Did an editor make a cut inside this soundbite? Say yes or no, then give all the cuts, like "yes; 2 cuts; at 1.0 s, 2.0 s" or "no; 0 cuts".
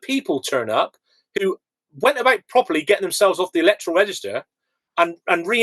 no; 0 cuts